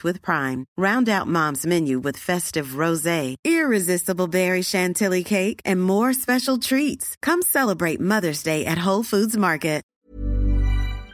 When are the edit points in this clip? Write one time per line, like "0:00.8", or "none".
0:09.9